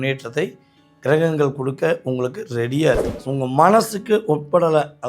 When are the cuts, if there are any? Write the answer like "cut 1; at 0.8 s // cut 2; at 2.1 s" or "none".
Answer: cut 1; at 3.1 s